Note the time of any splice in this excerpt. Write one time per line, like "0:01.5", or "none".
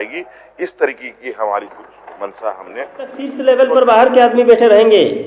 0:03.3